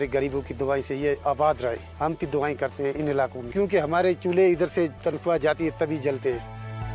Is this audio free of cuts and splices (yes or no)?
no